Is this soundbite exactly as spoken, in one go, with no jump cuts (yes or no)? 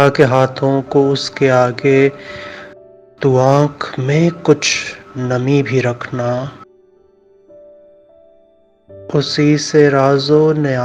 no